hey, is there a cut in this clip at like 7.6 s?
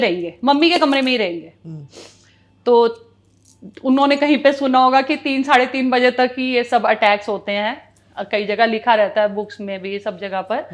no; 0 cuts

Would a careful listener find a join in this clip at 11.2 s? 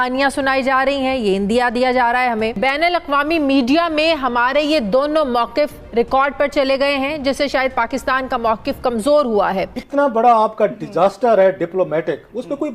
no; 2 cuts; at 2.6 s, 9.8 s

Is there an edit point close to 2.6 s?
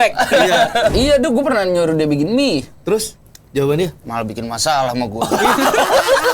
no; 1 cut; at 0.9 s

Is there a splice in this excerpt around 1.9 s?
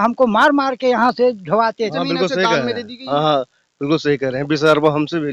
yes; 1 cut; at 1.9 s

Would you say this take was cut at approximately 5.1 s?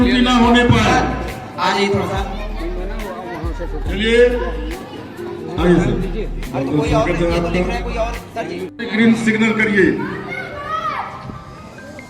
no; 1 cut; at 8.8 s

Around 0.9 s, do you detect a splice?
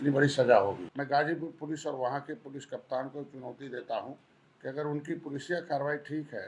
yes; 1 cut; at 0.9 s

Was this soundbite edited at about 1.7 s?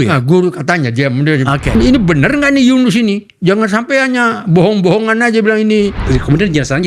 yes; 2 cuts; at 1.7 s, 6.0 s

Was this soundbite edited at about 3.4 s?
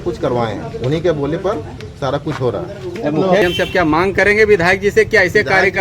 yes; 1 cut; at 3.4 s

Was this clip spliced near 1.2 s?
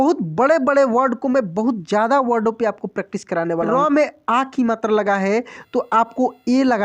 no; 1 cut; at 3.7 s

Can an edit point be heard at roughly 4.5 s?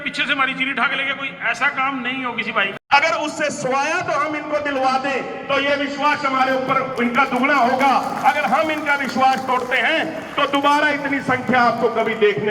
no; 1 cut; at 2.8 s

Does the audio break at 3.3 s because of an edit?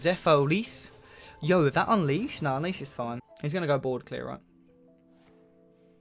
yes; 1 cut; at 3.3 s

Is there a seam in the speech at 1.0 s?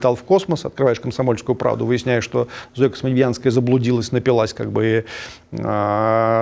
no; 0 cuts

